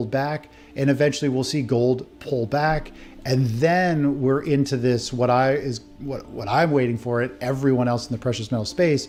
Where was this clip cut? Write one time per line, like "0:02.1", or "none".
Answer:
none